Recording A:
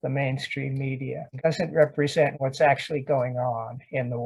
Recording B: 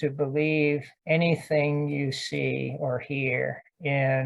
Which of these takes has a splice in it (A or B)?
A